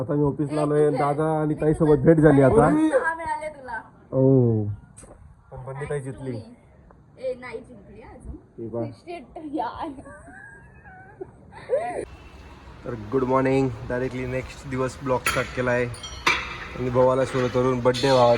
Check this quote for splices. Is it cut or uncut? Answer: cut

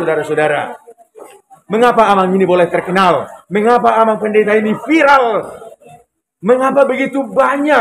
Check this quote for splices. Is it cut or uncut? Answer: uncut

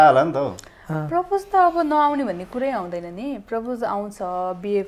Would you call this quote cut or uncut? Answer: uncut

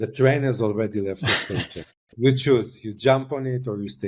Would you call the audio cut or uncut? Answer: uncut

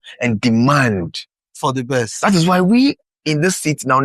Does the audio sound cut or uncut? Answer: cut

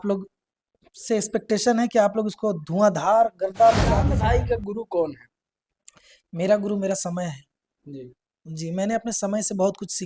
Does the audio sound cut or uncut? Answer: cut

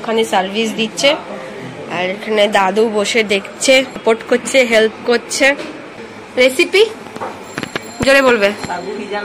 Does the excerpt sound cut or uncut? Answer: cut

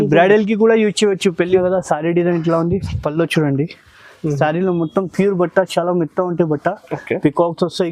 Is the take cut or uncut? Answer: cut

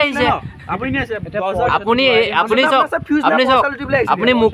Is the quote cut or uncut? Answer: uncut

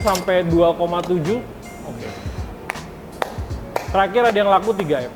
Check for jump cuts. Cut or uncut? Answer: uncut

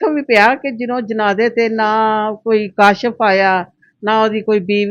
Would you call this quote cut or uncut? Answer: uncut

